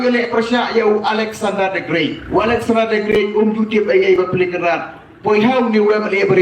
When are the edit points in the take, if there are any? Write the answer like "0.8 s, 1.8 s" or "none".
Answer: 2.2 s